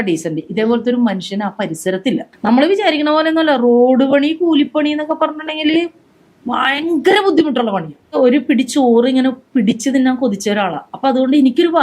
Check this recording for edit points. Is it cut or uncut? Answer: cut